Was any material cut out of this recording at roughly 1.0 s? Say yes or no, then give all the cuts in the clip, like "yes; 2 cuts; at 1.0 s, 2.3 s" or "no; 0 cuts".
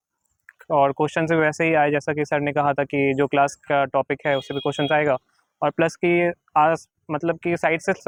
no; 0 cuts